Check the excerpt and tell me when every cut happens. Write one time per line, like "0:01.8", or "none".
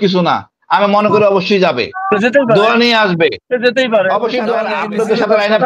0:04.7